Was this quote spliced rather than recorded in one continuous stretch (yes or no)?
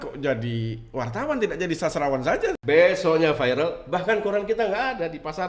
yes